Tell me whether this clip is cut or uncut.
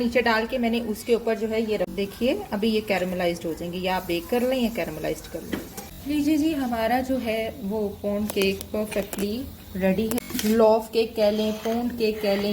cut